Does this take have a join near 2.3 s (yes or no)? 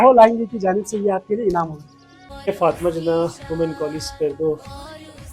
yes